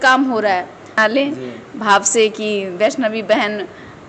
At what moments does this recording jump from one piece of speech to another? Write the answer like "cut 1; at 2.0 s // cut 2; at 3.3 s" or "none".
cut 1; at 0.9 s